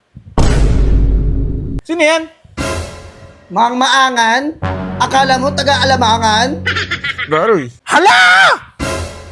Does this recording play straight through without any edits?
no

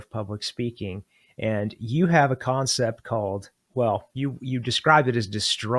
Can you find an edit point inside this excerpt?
yes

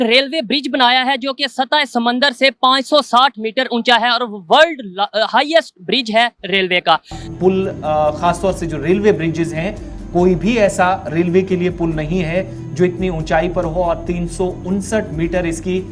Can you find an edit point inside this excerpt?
yes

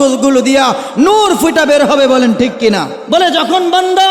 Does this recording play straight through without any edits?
no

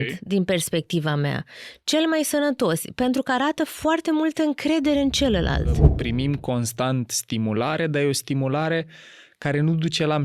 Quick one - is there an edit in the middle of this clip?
yes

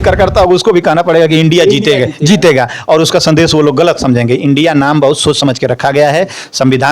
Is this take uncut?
yes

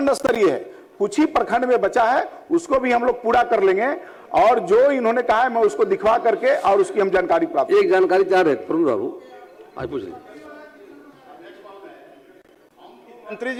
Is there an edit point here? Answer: no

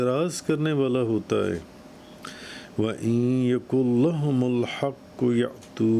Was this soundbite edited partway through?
no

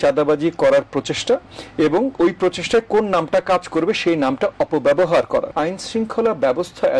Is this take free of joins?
no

